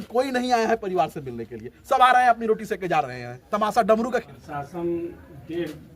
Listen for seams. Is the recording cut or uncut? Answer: cut